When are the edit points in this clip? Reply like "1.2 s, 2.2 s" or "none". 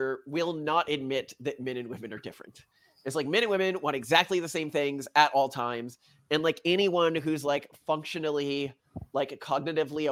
none